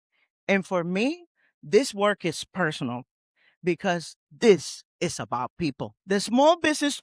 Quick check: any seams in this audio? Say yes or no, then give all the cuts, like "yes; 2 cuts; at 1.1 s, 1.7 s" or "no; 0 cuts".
yes; 1 cut; at 6.0 s